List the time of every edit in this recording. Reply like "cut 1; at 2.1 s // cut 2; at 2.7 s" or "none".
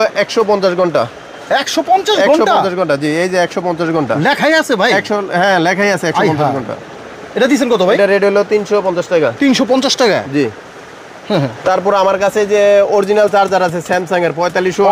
none